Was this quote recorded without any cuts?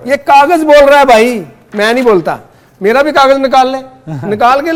yes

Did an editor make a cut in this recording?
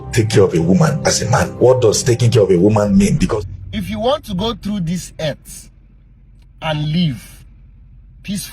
yes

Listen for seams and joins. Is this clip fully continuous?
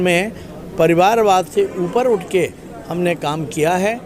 yes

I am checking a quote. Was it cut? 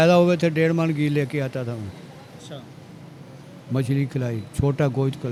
no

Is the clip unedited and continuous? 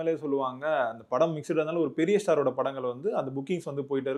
yes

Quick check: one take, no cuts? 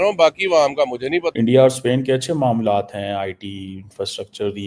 no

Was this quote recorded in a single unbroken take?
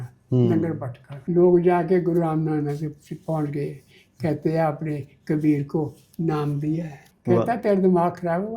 no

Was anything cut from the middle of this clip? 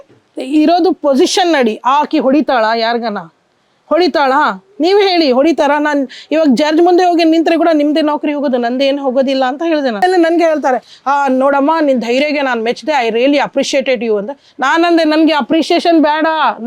yes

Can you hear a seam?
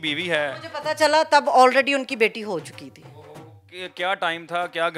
no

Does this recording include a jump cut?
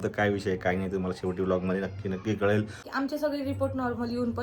yes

